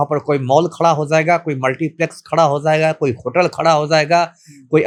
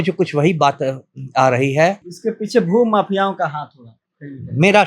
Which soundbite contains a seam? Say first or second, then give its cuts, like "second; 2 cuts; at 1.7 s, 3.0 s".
second; 1 cut; at 2.1 s